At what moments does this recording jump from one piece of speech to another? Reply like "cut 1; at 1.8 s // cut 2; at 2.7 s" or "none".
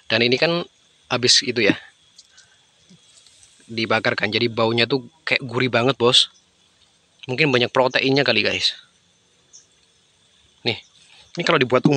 none